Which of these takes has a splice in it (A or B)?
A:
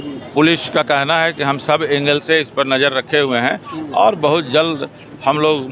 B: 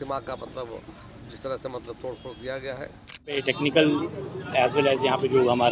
B